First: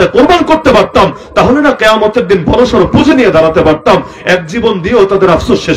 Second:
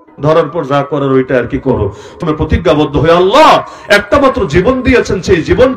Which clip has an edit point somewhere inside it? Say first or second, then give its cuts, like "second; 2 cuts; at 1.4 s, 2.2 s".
second; 1 cut; at 2.2 s